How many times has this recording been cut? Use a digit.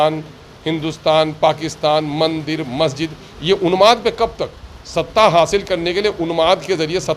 0